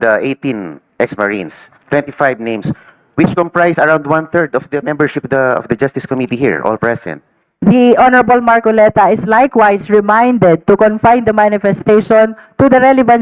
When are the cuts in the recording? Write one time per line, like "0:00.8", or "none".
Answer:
none